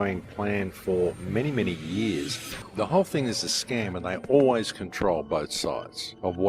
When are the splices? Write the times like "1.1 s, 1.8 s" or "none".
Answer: 2.3 s